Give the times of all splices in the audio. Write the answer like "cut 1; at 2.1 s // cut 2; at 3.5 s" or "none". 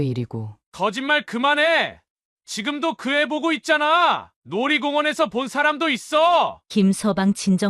cut 1; at 6.6 s